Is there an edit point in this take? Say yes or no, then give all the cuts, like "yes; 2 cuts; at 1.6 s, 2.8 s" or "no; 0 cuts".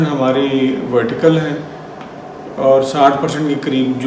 no; 0 cuts